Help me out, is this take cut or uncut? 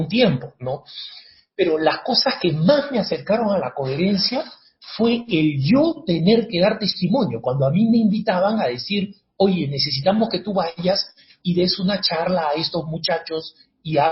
uncut